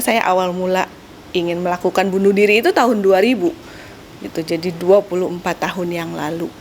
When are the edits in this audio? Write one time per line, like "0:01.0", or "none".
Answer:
none